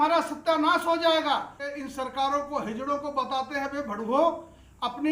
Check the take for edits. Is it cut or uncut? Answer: cut